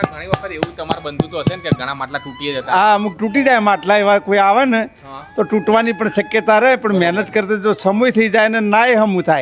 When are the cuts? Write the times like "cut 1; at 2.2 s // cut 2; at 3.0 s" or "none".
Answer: none